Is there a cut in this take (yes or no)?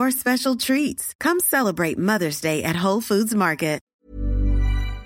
yes